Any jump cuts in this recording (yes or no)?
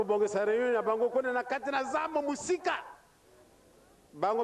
no